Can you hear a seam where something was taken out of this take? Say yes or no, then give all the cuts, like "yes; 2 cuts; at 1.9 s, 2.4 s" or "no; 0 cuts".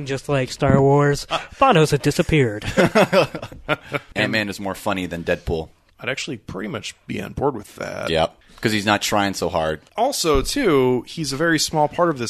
yes; 4 cuts; at 4.0 s, 5.8 s, 8.4 s, 9.8 s